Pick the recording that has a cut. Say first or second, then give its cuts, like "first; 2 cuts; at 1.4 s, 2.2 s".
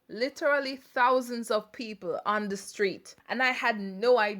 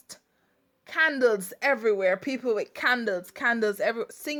first; 1 cut; at 3.1 s